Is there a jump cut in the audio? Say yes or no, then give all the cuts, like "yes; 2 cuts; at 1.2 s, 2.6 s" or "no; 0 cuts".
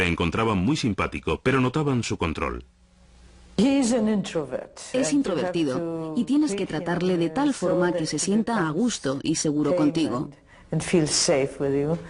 no; 0 cuts